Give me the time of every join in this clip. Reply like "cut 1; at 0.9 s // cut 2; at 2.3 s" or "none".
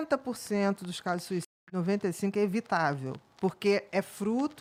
none